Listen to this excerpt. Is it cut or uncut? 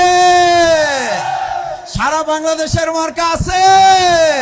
uncut